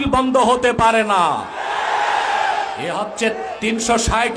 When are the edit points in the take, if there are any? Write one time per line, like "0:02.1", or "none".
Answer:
0:03.0